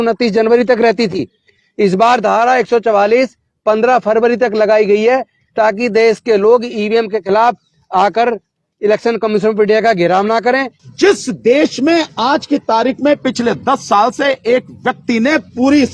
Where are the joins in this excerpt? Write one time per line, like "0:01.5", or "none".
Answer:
0:10.8